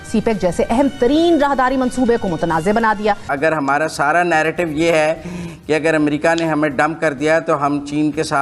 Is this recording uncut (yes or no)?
no